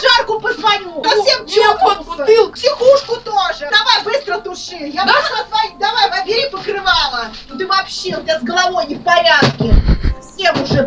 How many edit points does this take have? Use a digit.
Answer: 3